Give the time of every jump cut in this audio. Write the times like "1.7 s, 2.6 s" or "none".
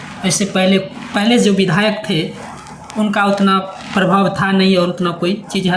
none